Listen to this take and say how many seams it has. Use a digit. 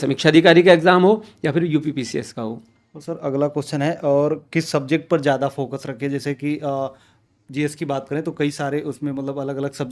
0